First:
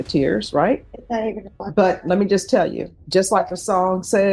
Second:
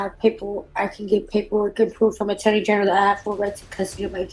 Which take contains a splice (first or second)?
first